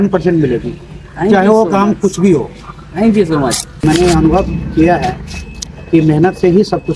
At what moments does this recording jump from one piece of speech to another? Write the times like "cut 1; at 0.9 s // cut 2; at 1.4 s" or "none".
cut 1; at 3.8 s